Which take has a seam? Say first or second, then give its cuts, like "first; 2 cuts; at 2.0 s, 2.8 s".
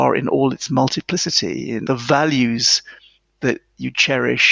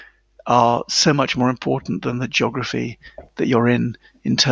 first; 1 cut; at 1.8 s